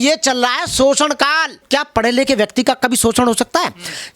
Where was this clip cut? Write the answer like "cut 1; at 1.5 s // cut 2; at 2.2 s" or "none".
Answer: cut 1; at 1.6 s